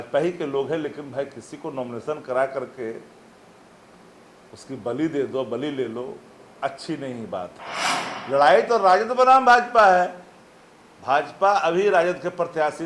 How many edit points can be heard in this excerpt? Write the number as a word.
one